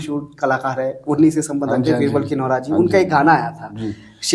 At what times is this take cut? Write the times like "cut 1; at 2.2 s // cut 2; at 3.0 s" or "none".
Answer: none